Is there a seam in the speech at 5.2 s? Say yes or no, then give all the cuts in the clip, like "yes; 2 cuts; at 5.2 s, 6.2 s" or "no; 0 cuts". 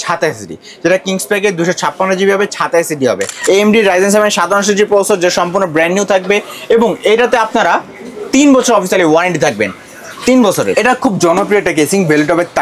no; 2 cuts; at 3.3 s, 10.7 s